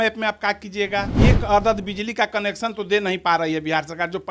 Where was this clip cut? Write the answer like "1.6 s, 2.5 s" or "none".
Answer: 1.1 s